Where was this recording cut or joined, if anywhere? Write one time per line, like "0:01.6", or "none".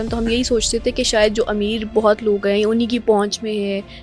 none